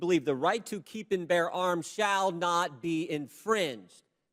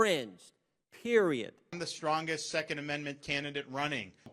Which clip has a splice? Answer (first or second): second